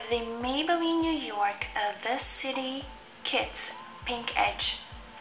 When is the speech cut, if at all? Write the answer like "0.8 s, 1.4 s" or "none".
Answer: none